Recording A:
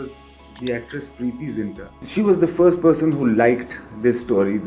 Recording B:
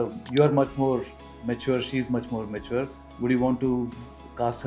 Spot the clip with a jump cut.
A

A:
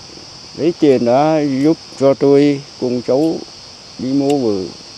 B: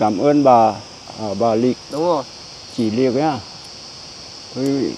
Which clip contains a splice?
B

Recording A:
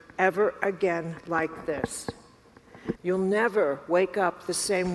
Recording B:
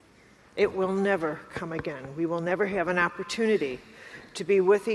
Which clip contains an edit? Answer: A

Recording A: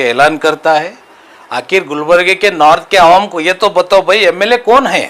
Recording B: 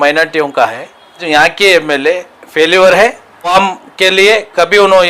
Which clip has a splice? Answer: B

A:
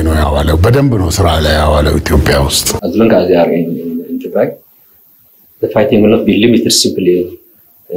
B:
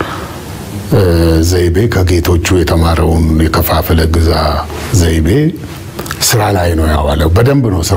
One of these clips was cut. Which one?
A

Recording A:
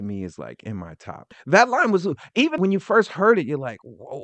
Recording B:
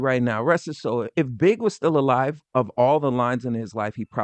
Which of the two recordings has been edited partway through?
A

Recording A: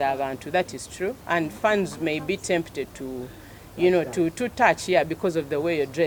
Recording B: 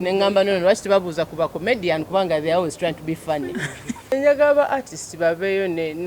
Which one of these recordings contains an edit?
B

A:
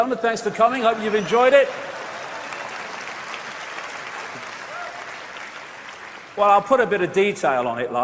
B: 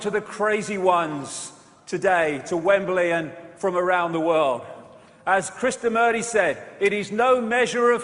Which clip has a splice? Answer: A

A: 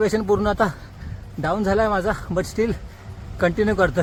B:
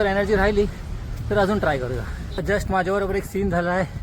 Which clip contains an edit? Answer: B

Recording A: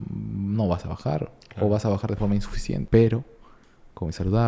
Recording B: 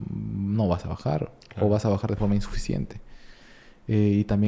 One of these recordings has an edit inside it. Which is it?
A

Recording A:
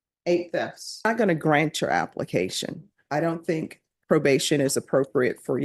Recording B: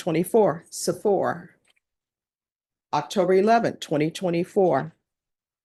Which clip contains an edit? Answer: A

